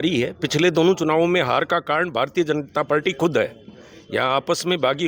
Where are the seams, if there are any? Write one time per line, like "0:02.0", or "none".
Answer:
none